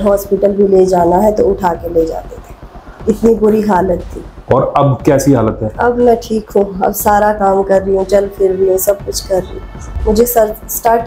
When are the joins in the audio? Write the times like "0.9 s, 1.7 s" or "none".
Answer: 9.8 s